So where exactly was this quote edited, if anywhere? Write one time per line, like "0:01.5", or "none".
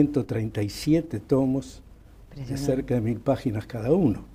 none